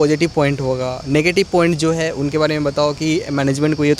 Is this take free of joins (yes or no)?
yes